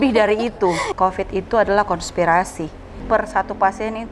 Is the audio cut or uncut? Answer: cut